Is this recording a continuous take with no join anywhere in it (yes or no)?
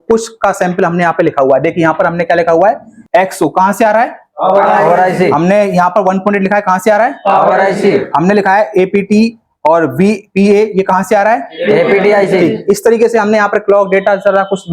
no